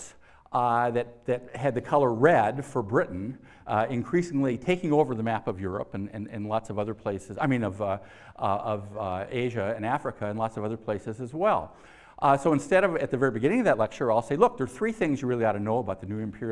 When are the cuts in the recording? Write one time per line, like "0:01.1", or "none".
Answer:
none